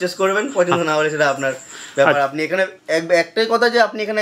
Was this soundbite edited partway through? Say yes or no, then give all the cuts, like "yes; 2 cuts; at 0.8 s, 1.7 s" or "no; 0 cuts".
no; 0 cuts